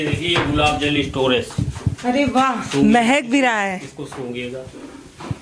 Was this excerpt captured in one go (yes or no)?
yes